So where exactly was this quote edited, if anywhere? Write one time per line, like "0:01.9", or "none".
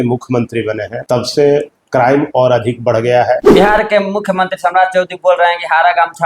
0:00.9
0:03.5